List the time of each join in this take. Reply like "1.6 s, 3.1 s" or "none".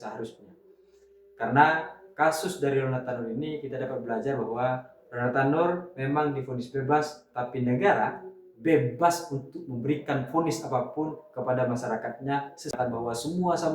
12.8 s